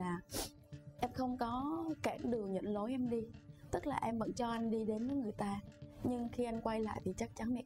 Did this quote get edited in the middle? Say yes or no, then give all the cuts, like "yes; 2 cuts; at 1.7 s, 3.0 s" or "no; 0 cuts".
no; 0 cuts